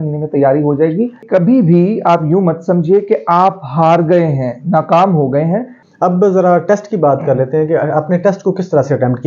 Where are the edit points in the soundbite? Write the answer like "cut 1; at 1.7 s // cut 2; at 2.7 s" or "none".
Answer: cut 1; at 1.2 s // cut 2; at 5.8 s